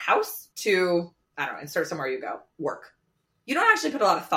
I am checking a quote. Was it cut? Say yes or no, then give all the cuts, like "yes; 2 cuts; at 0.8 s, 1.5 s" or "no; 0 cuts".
no; 0 cuts